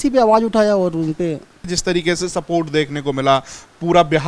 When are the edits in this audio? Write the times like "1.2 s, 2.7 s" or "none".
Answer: 1.7 s